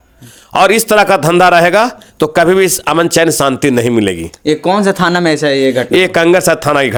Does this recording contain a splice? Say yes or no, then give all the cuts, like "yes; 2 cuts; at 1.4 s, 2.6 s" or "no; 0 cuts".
no; 0 cuts